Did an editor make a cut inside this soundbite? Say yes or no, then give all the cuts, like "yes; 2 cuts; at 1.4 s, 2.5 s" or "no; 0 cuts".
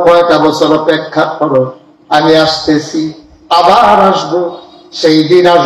no; 0 cuts